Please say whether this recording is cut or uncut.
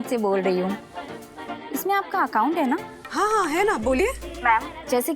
uncut